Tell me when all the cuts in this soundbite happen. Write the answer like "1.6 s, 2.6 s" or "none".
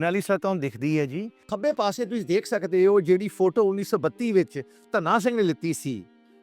1.4 s